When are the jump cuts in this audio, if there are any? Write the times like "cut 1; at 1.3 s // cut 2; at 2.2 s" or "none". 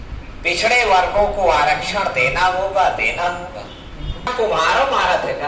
cut 1; at 4.3 s